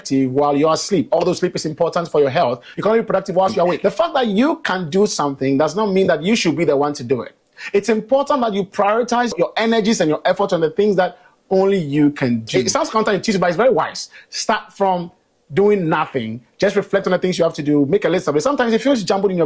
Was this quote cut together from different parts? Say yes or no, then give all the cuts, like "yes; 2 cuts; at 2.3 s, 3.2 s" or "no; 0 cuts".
yes; 4 cuts; at 2.7 s, 3.8 s, 9.3 s, 12.7 s